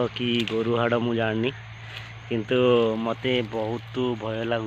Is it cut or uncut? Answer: uncut